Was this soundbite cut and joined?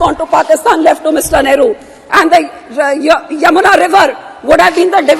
no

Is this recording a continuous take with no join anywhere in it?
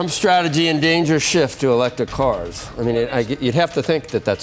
yes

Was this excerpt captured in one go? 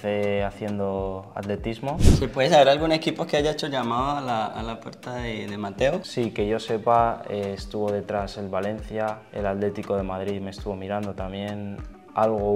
no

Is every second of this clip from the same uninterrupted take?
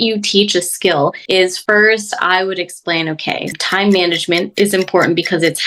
no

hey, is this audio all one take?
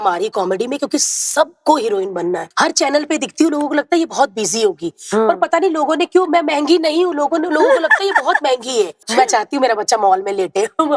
no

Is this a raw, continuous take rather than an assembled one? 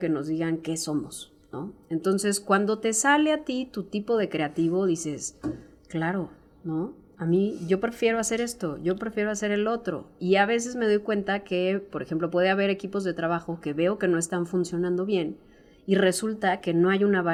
yes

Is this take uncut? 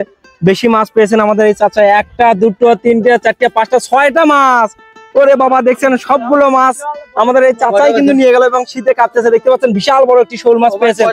yes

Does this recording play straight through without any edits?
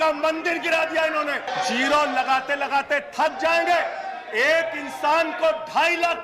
no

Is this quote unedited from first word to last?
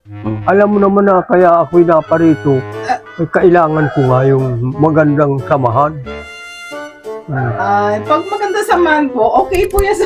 yes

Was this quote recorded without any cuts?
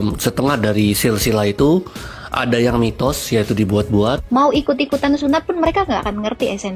no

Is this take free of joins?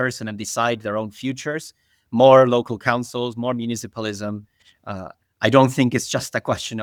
yes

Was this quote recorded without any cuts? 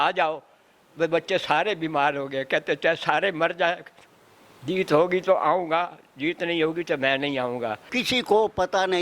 no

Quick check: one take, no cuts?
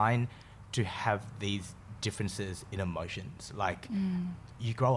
yes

